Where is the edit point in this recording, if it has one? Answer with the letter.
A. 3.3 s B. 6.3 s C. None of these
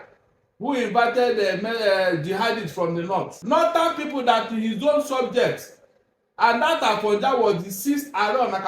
A